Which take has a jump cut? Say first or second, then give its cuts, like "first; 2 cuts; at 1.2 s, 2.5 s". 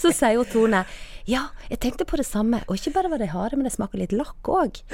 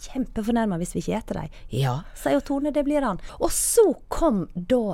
second; 1 cut; at 3.2 s